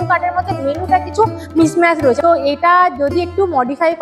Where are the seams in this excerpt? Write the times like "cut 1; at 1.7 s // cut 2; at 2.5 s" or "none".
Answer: cut 1; at 2.2 s